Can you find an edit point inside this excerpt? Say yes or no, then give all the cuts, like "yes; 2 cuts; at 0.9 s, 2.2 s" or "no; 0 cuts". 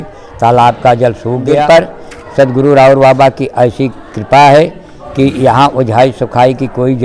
yes; 1 cut; at 1.5 s